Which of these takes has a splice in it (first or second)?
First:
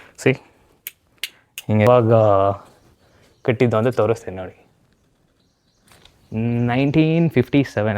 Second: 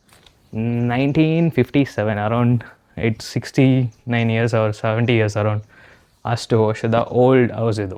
first